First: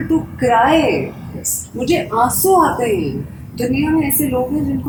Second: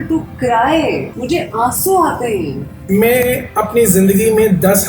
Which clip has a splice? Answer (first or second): second